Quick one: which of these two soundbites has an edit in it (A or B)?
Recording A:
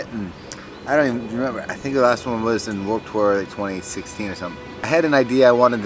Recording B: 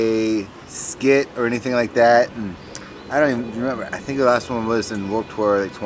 A